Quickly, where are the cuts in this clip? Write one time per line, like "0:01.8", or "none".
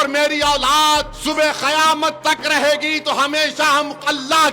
0:01.1

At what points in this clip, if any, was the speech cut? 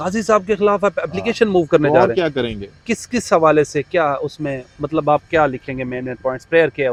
none

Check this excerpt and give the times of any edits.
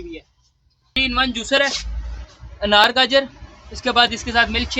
0:01.0

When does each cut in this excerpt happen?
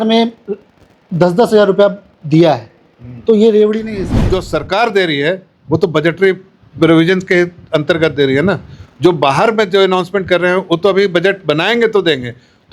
0:04.3

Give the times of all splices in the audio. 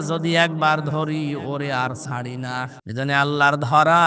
0:02.8

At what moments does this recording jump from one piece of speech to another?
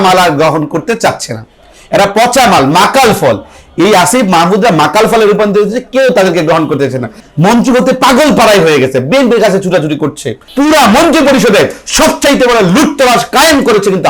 0:07.2
0:10.4

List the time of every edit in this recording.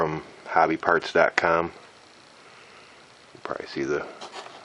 0:01.7

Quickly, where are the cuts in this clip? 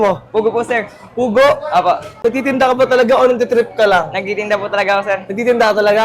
none

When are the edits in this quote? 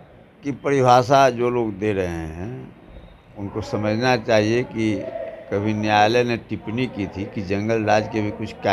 none

